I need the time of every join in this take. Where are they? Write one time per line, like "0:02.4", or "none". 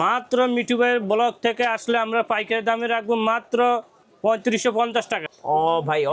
0:05.2